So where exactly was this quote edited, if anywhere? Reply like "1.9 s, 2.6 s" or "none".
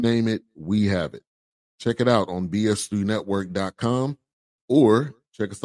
none